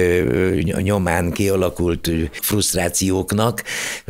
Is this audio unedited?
no; 1 cut; at 2.4 s

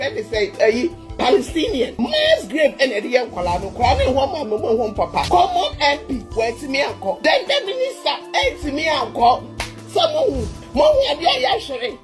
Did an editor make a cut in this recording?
yes; 4 cuts; at 1.9 s, 5.3 s, 7.2 s, 10.6 s

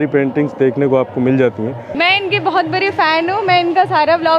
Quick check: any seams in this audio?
no; 0 cuts

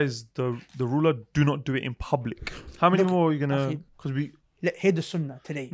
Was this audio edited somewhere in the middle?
yes; 1 cut; at 2.4 s

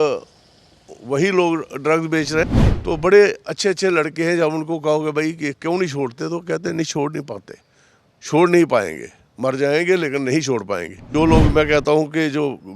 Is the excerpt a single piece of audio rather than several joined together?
no; 2 cuts; at 2.4 s, 10.9 s

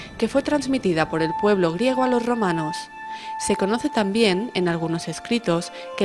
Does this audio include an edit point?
no; 0 cuts

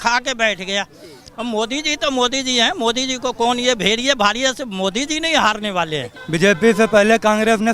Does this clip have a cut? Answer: yes; 1 cut; at 6.1 s

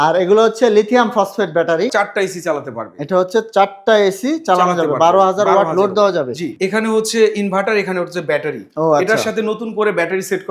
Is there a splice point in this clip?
yes; 2 cuts; at 1.9 s, 6.5 s

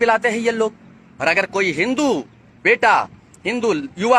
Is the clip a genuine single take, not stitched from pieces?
yes; 0 cuts

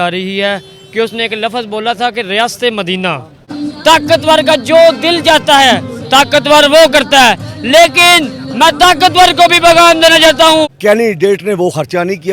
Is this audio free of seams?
no; 2 cuts; at 3.6 s, 10.7 s

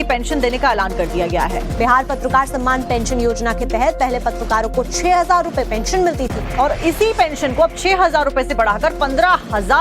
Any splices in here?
yes; 1 cut; at 5.4 s

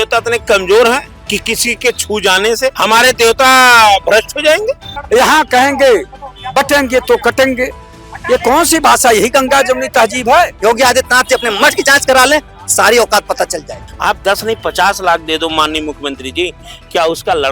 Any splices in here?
yes; 5 cuts; at 1.2 s, 2.8 s, 4.9 s, 10.5 s, 13.8 s

